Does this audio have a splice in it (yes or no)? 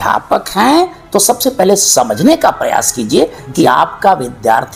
no